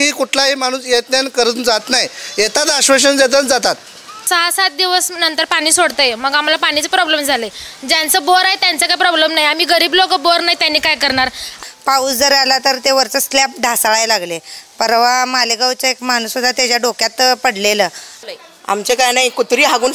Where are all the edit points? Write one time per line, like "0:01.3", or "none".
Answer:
0:04.2
0:11.6
0:18.1